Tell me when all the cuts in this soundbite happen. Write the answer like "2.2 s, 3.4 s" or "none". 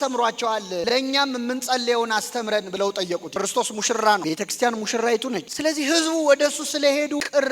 3.3 s